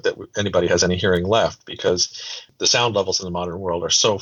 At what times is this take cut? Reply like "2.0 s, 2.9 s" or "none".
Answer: 2.6 s